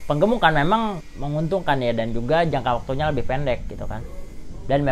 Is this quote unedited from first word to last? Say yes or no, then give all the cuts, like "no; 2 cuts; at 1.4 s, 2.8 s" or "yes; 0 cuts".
no; 1 cut; at 1.1 s